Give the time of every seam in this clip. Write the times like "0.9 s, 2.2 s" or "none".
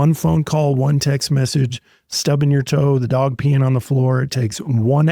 none